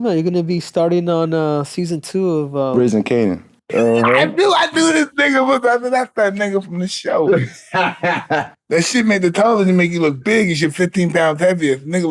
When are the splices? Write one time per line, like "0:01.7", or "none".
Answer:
0:03.7